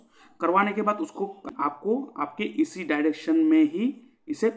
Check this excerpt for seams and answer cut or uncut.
cut